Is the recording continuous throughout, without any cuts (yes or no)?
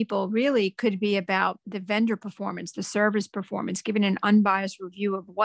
no